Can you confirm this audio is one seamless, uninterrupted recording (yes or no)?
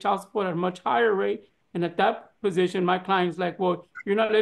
yes